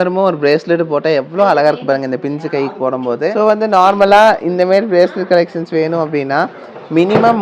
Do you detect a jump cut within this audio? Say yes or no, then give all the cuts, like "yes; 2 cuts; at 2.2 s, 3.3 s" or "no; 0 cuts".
yes; 1 cut; at 3.3 s